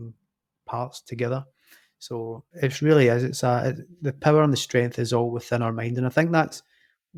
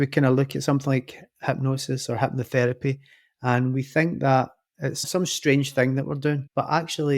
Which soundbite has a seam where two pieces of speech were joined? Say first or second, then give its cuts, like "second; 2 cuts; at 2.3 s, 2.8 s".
second; 1 cut; at 5.0 s